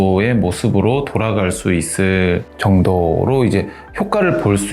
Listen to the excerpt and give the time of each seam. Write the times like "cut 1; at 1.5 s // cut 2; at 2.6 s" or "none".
cut 1; at 2.5 s